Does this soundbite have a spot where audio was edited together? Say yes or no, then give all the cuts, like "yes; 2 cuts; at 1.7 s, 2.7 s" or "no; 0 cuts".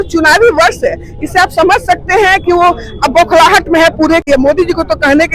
yes; 1 cut; at 4.2 s